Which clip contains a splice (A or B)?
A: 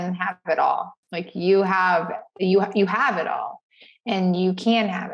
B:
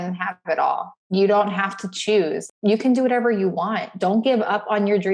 B